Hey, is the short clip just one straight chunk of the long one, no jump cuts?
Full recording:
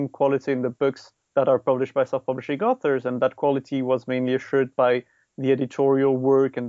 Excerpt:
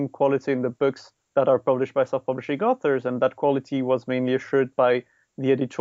yes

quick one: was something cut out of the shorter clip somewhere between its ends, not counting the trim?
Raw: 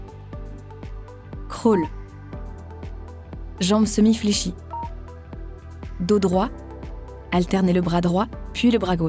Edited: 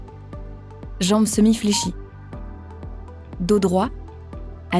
yes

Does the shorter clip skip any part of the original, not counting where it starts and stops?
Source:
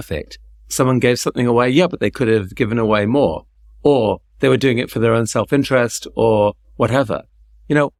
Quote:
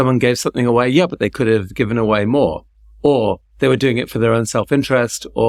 no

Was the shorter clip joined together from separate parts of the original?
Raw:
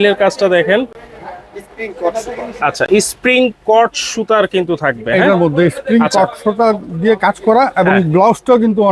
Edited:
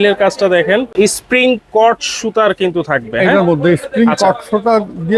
yes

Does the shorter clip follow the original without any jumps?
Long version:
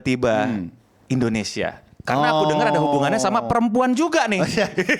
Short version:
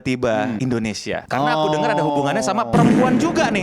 no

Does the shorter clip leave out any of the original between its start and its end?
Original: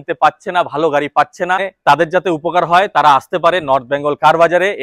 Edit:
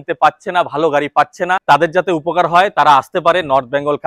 yes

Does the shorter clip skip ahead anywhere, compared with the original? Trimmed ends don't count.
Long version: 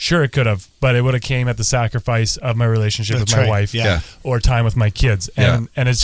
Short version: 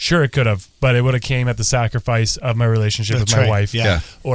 no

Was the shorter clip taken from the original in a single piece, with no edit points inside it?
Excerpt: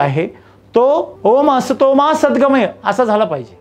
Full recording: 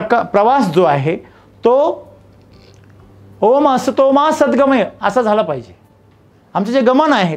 no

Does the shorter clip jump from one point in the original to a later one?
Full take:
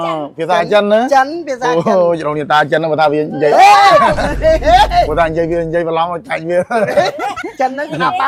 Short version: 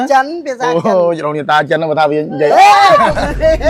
no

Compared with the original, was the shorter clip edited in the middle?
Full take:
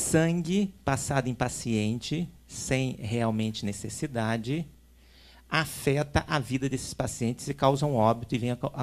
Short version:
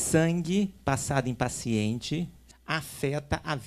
yes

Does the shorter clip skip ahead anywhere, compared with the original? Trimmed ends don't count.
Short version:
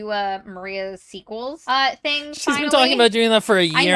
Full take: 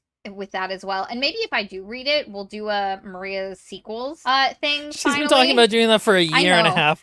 no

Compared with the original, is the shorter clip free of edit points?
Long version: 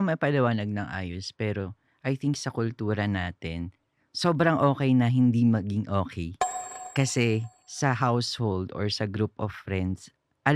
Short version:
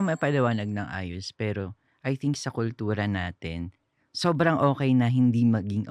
yes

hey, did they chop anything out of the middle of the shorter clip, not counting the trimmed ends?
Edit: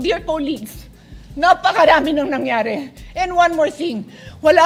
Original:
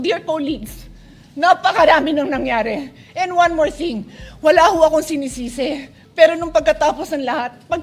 no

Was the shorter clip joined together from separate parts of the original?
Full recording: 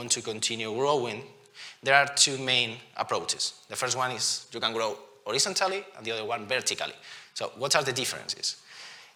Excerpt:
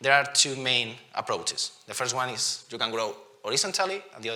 no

